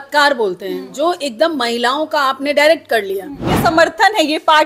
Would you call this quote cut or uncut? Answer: cut